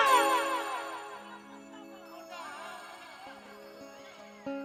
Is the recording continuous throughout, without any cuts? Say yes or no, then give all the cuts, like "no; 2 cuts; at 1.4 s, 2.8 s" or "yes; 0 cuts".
yes; 0 cuts